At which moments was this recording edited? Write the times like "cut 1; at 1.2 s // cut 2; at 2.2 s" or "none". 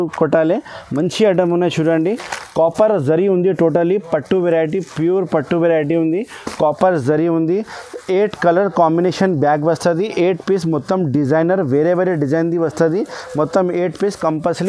none